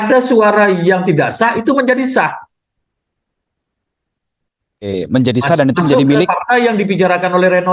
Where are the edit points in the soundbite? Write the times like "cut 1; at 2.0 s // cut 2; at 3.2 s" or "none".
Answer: none